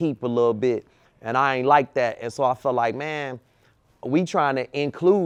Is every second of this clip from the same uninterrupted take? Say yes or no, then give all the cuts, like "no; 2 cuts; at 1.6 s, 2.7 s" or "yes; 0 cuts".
yes; 0 cuts